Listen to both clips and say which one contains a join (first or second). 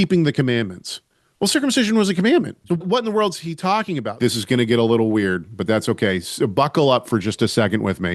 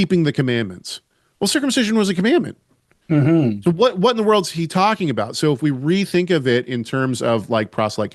first